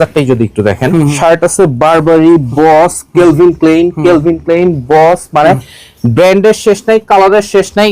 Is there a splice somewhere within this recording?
yes; 1 cut; at 1.1 s

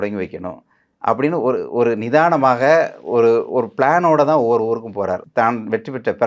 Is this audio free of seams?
no; 1 cut; at 5.2 s

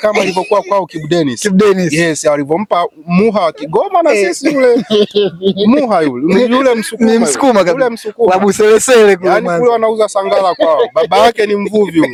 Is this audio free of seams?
yes; 0 cuts

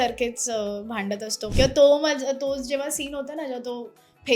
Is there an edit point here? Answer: yes; 1 cut; at 1.4 s

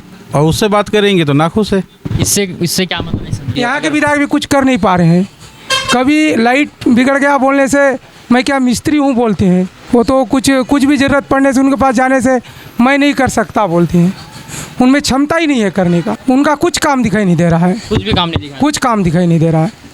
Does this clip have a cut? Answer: yes; 3 cuts; at 3.5 s, 9.8 s, 16.2 s

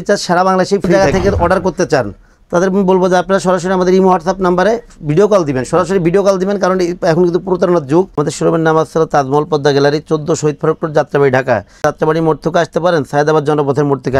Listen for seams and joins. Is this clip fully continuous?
no; 3 cuts; at 0.9 s, 8.2 s, 11.8 s

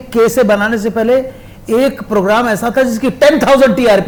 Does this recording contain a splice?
no; 0 cuts

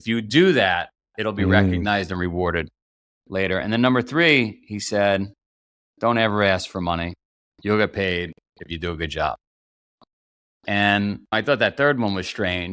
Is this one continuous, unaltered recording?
no; 1 cut; at 11.2 s

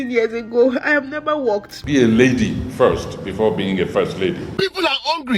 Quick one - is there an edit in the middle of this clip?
yes; 2 cuts; at 1.7 s, 4.5 s

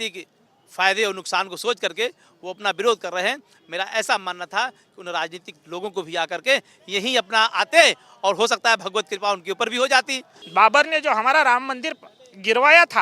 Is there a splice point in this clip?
yes; 1 cut; at 10.4 s

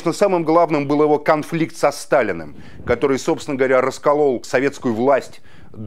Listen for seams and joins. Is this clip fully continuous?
no; 1 cut; at 4.4 s

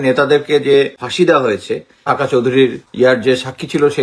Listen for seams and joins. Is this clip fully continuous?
no; 3 cuts; at 1.0 s, 2.0 s, 2.8 s

